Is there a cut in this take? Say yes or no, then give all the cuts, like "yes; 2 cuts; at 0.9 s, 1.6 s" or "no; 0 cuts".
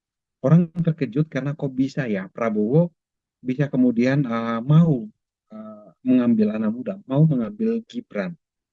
no; 0 cuts